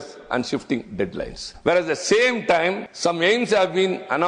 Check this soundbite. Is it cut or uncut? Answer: cut